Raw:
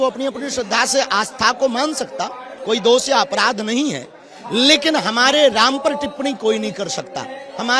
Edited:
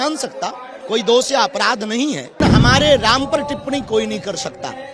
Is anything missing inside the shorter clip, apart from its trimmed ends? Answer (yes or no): yes